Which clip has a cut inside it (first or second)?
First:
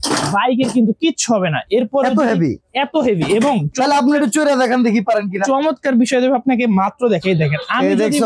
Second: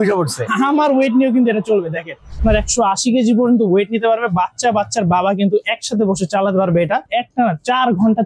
second